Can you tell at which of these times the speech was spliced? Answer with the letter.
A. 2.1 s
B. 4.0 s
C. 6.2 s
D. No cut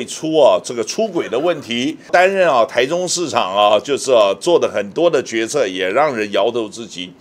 A